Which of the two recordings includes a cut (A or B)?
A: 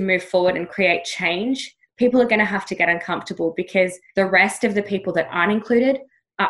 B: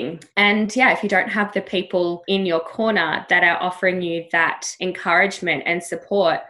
B